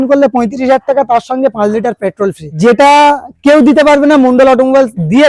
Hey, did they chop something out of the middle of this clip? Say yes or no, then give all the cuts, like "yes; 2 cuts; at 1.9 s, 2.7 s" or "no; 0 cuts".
yes; 1 cut; at 2.5 s